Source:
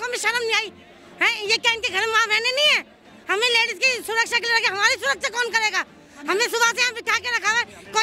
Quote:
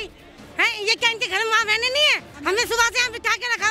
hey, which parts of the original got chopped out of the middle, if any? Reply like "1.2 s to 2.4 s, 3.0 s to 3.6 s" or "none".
2.9 s to 6.1 s